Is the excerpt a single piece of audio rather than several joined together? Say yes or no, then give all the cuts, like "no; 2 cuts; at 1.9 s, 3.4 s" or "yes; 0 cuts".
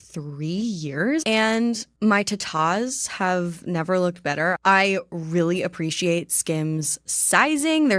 no; 2 cuts; at 2.0 s, 4.6 s